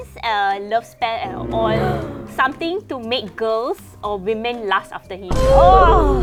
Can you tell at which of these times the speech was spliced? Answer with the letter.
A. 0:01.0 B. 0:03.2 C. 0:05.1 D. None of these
D